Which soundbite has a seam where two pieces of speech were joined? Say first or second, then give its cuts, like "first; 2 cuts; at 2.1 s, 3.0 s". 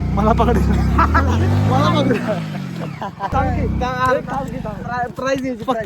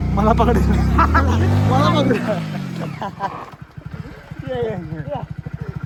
first; 1 cut; at 3.3 s